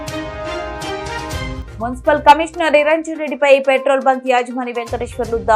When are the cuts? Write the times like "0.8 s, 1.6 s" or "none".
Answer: 1.6 s